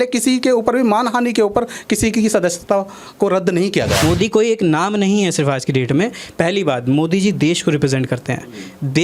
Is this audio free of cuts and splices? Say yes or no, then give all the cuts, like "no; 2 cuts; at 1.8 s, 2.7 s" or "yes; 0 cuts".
no; 1 cut; at 4.0 s